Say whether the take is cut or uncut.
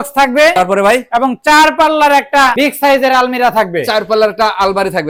uncut